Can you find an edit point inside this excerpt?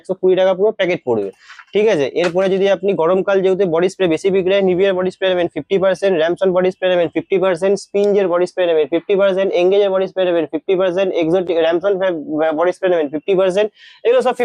no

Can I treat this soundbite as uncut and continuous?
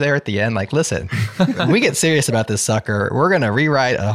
yes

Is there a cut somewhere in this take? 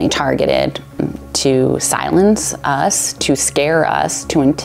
yes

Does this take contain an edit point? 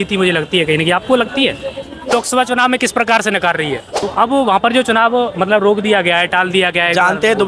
yes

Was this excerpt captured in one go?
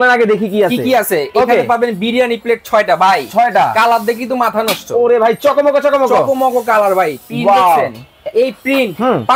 yes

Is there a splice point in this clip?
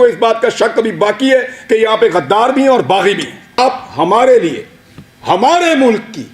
yes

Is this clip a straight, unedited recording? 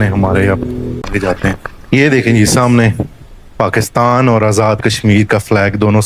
no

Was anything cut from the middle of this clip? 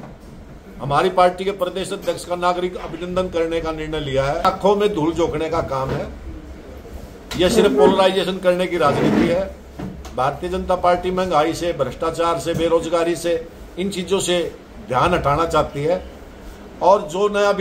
yes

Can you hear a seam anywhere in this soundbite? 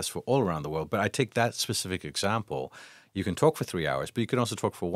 no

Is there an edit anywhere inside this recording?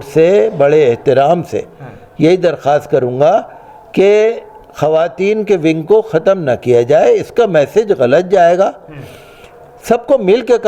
no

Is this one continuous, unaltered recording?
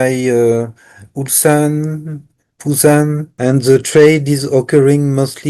no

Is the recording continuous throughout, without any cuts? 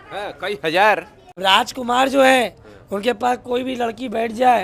no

